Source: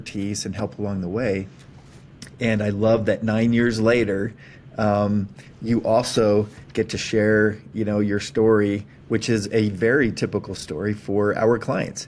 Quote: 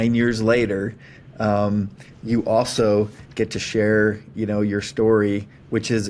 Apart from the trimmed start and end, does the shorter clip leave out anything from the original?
no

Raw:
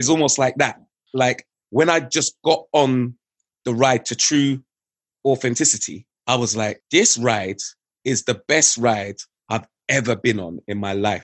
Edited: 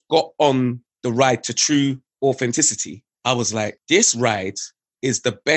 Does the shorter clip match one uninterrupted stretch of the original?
no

